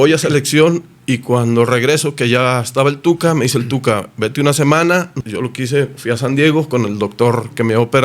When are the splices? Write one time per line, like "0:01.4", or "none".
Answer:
0:05.2

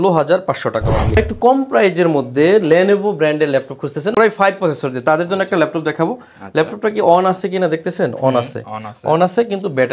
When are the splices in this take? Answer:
0:01.1

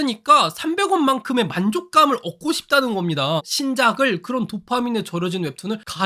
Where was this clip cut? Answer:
0:03.4

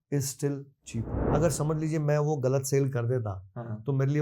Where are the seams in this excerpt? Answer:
0:01.2

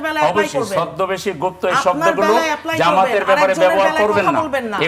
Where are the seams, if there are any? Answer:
none

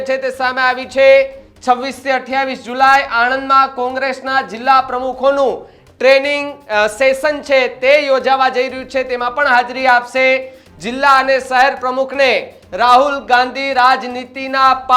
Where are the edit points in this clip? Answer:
none

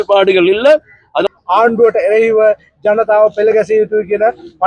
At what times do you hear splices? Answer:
0:01.2

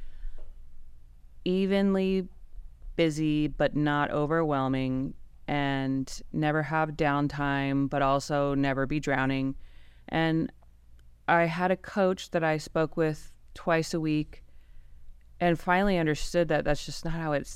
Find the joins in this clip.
none

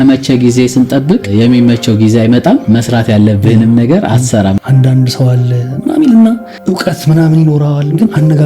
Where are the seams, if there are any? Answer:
0:01.3
0:02.6
0:04.6

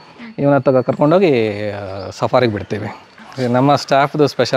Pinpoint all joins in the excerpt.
0:03.0

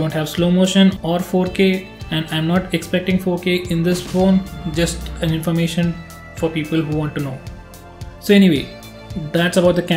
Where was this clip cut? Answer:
0:05.2

